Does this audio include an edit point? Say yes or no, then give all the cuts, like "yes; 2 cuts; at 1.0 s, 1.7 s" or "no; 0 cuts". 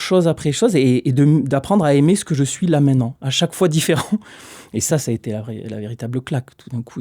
no; 0 cuts